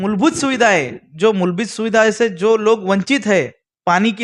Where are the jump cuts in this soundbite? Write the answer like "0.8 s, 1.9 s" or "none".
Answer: none